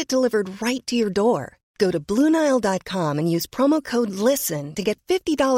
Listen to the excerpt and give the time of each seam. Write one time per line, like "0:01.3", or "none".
none